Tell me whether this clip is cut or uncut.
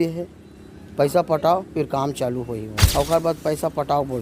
cut